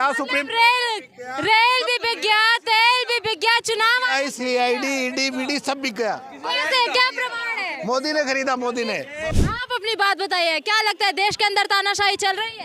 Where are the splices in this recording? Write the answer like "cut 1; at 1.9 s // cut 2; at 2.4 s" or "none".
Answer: cut 1; at 9.5 s